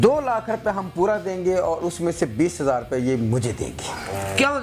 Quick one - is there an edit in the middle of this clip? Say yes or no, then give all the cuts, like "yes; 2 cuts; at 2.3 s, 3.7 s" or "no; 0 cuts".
no; 0 cuts